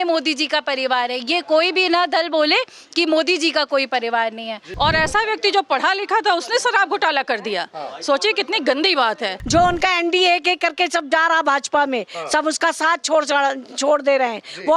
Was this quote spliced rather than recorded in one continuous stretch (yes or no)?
yes